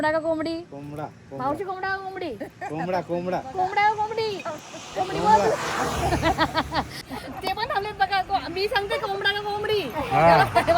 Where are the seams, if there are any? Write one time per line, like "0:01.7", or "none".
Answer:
0:06.9